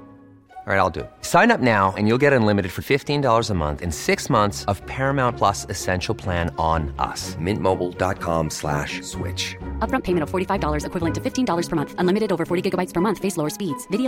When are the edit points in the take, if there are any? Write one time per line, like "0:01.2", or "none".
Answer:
none